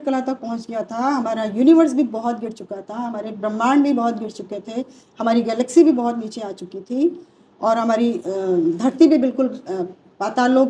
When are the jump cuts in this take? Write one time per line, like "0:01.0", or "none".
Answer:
none